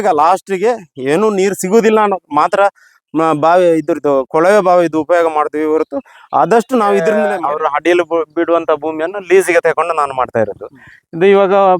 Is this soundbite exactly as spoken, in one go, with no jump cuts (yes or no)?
no